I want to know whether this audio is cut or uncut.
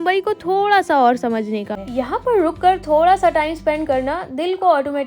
cut